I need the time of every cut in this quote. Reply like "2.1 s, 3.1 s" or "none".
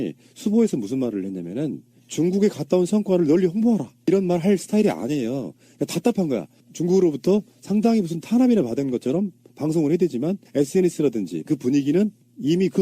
3.4 s

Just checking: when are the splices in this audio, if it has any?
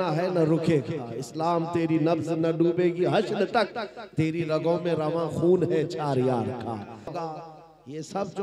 7.1 s

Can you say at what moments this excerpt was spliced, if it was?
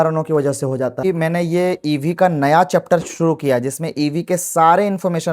1.0 s

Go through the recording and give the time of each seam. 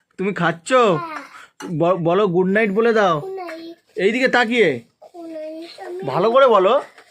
none

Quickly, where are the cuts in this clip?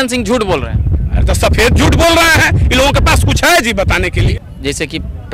4.3 s

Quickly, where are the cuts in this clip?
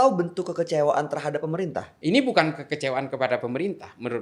1.9 s

